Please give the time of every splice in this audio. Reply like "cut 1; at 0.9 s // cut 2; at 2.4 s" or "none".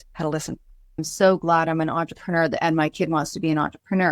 cut 1; at 1.1 s